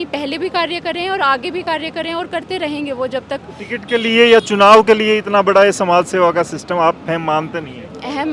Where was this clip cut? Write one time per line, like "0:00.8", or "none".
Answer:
none